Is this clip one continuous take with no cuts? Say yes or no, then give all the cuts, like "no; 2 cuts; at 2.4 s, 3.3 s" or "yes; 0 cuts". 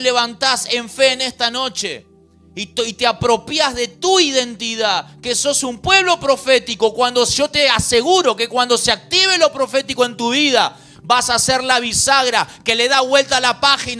yes; 0 cuts